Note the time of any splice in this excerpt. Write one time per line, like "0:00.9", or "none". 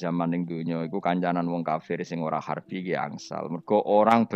none